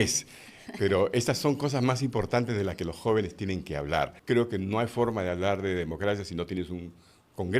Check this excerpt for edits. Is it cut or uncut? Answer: cut